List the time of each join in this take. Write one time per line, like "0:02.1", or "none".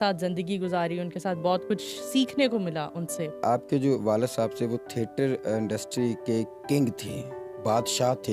0:03.4